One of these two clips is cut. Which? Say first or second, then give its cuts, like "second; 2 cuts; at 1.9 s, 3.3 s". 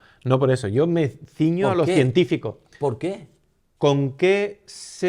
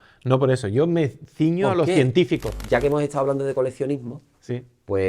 second; 1 cut; at 2.6 s